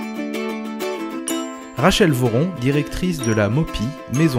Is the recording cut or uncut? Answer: uncut